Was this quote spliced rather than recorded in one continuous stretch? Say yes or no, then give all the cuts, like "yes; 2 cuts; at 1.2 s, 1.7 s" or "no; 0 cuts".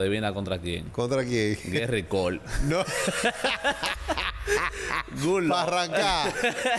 no; 0 cuts